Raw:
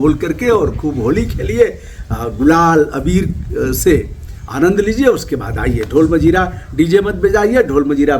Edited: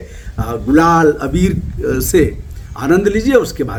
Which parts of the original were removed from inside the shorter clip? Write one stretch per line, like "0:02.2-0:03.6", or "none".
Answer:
none